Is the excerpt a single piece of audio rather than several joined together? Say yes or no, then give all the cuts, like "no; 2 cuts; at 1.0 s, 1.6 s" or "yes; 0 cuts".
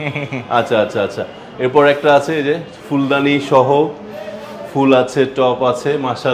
yes; 0 cuts